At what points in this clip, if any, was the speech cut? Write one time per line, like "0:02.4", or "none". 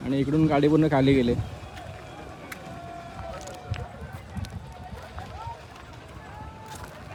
none

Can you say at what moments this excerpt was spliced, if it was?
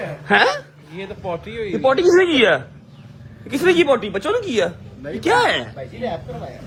none

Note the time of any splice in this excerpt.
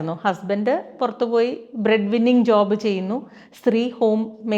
none

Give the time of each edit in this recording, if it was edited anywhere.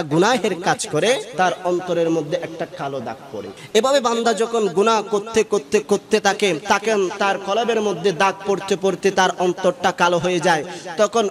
0:01.3
0:03.5
0:06.6

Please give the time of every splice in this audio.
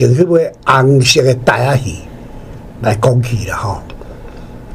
none

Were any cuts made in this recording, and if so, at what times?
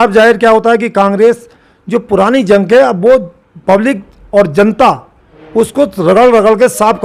none

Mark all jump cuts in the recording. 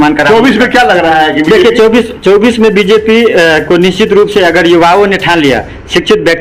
none

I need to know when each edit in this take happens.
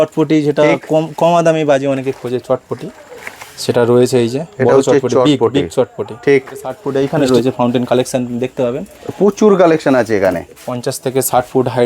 0:06.8

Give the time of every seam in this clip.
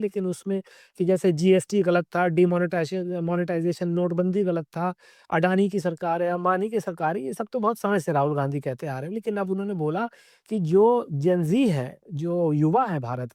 none

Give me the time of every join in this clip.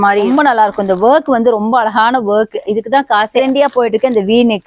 none

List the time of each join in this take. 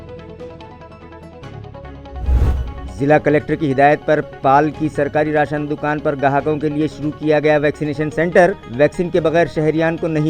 0:02.5

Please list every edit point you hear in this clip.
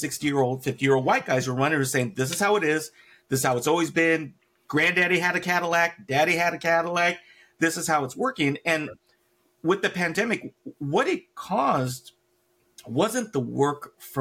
none

